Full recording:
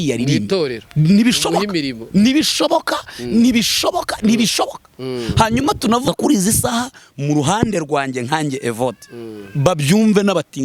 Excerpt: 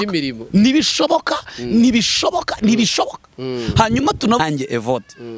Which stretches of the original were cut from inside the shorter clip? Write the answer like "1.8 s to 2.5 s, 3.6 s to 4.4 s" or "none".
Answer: 6.0 s to 8.3 s